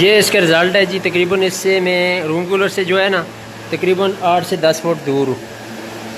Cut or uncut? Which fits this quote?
uncut